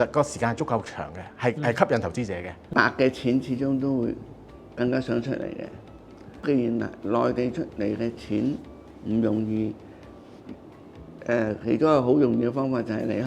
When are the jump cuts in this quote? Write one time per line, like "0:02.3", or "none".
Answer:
0:02.5
0:06.4

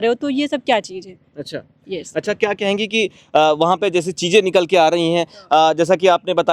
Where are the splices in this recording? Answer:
none

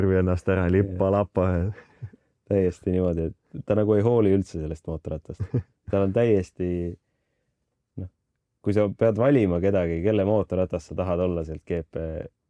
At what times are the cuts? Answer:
none

